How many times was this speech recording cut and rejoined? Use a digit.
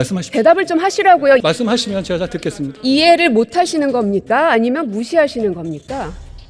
1